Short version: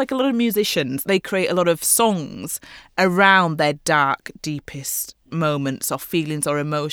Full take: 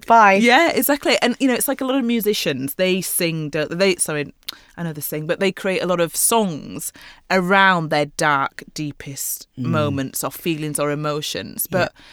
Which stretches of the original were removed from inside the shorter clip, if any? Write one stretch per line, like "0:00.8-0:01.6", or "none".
0:02.7-0:05.4